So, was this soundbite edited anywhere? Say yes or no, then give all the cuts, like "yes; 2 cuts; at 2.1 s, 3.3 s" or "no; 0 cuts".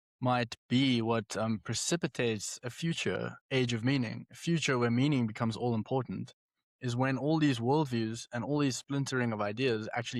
no; 0 cuts